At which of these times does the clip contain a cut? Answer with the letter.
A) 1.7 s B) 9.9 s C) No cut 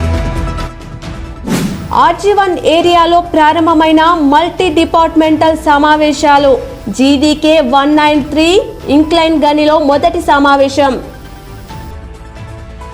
A